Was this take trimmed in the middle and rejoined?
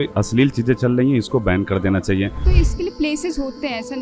yes; 1 cut; at 2.5 s

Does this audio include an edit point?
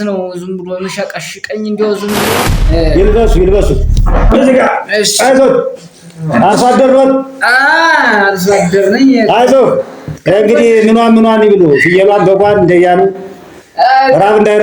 yes; 1 cut; at 2.3 s

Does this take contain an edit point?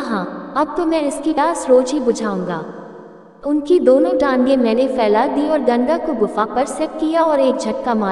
yes; 1 cut; at 1.4 s

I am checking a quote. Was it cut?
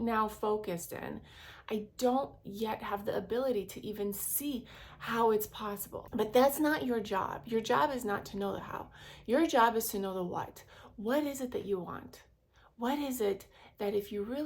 yes; 1 cut; at 5.9 s

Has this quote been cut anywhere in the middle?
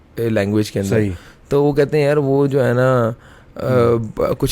no; 0 cuts

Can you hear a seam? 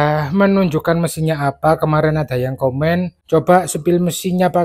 yes; 1 cut; at 3.2 s

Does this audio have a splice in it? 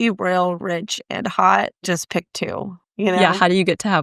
no; 0 cuts

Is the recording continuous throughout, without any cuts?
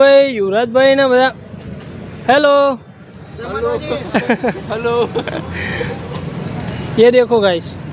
yes; 0 cuts

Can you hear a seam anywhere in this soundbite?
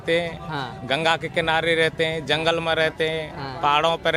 no; 0 cuts

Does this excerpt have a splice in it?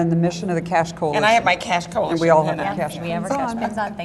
yes; 1 cut; at 2.3 s

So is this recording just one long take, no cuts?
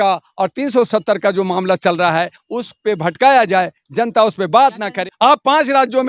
no; 1 cut; at 5.0 s

